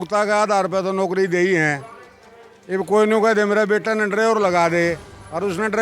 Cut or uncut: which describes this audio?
uncut